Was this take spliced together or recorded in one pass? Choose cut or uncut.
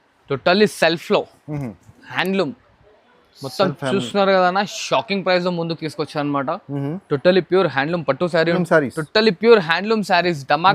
cut